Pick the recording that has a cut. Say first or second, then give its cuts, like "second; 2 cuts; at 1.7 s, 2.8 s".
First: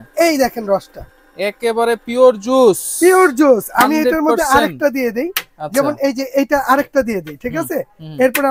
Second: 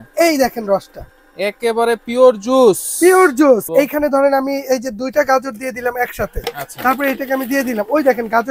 second; 1 cut; at 3.6 s